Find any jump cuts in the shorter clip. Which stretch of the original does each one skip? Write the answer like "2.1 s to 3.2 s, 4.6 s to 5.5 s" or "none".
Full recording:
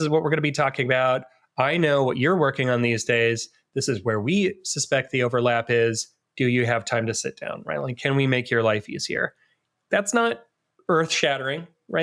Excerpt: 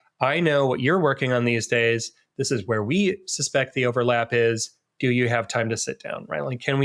none